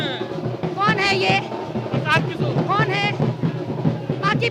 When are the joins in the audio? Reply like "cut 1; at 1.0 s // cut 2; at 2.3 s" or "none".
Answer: none

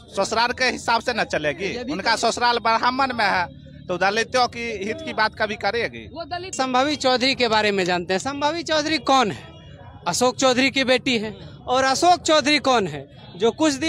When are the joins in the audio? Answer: cut 1; at 6.5 s

